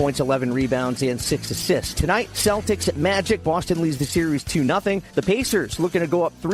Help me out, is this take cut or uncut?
uncut